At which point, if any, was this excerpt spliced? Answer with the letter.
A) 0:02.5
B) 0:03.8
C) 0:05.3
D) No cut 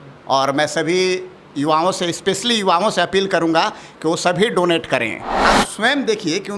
C